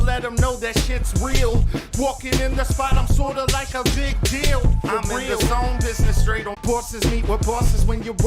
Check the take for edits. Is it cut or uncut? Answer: cut